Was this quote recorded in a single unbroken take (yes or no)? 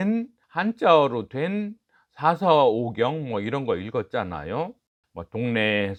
yes